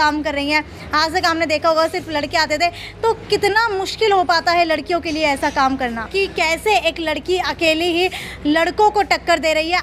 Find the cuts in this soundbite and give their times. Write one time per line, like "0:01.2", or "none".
0:06.1